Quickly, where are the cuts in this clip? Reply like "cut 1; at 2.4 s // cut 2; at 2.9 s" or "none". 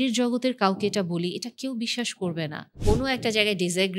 cut 1; at 2.7 s